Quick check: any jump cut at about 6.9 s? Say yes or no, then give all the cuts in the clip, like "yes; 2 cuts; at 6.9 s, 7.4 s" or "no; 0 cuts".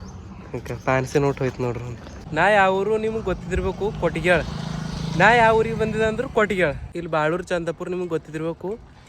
yes; 2 cuts; at 2.2 s, 6.9 s